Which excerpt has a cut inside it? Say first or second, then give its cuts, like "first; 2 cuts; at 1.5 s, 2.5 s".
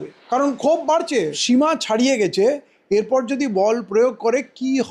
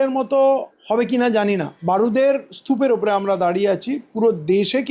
second; 1 cut; at 1.7 s